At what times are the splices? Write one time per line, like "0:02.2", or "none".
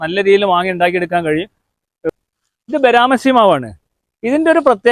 0:02.1